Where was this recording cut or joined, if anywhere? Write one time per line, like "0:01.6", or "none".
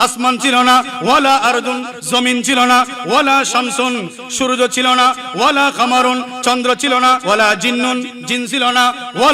0:07.2